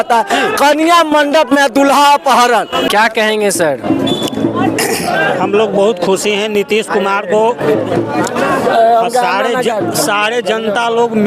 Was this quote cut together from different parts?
yes; 1 cut; at 2.9 s

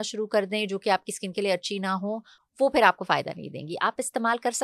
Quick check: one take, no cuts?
yes; 0 cuts

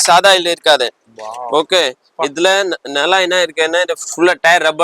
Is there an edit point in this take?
no; 0 cuts

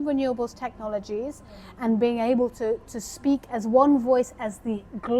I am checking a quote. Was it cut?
no; 0 cuts

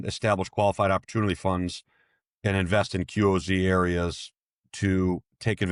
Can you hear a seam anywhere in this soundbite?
no; 0 cuts

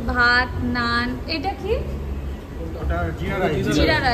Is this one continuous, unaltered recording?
yes; 0 cuts

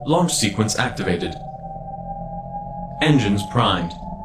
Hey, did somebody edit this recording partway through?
no; 0 cuts

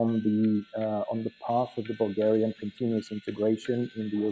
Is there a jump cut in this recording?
no; 0 cuts

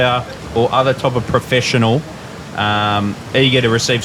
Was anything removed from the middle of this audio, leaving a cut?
no; 0 cuts

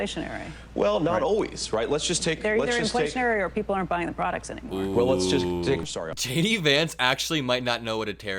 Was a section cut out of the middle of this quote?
yes; 1 cut; at 5.8 s

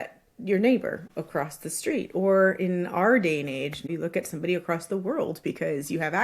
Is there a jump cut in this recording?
yes; 2 cuts; at 1.0 s, 3.8 s

